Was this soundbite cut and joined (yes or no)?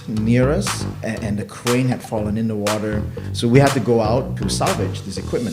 yes